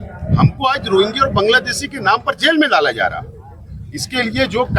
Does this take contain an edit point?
no; 0 cuts

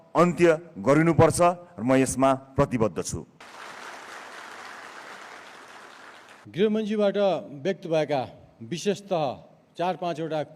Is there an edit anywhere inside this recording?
yes; 2 cuts; at 3.4 s, 6.4 s

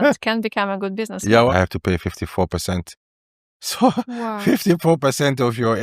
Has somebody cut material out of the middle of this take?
yes; 1 cut; at 1.5 s

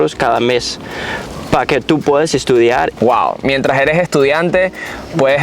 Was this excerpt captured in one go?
no; 1 cut; at 2.9 s

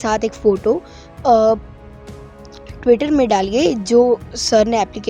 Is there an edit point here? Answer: no; 0 cuts

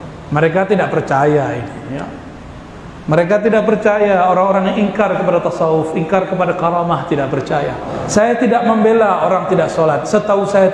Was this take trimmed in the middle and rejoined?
yes; 1 cut; at 7.9 s

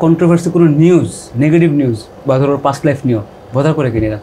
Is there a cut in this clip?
no; 0 cuts

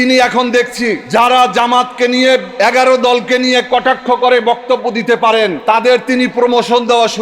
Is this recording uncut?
no; 3 cuts; at 1.0 s, 2.5 s, 5.6 s

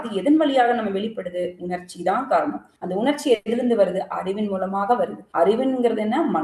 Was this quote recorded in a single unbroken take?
yes; 0 cuts

